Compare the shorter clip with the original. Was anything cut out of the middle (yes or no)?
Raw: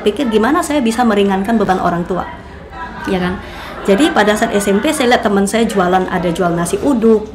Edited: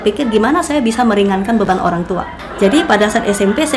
yes